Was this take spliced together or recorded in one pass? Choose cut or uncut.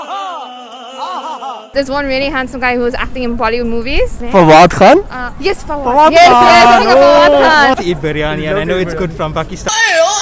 cut